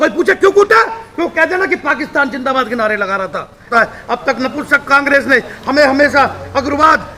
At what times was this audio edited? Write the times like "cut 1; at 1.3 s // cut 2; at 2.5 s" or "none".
cut 1; at 3.7 s

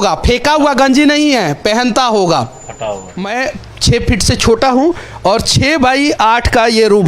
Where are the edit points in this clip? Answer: cut 1; at 3.1 s

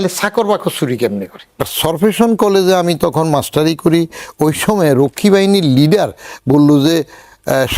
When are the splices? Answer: cut 1; at 1.6 s

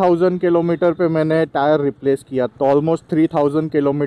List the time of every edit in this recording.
cut 1; at 2.5 s

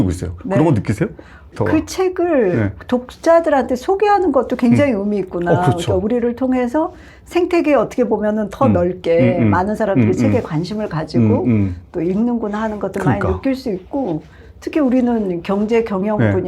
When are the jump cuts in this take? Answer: cut 1; at 1.5 s

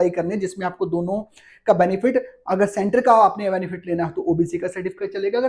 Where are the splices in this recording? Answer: none

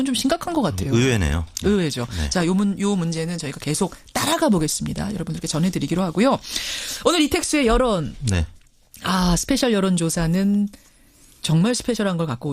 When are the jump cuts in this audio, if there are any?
cut 1; at 9.4 s

